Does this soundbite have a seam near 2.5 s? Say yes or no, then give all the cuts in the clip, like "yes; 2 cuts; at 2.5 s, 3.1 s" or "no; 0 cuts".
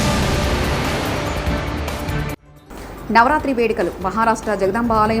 yes; 1 cut; at 2.5 s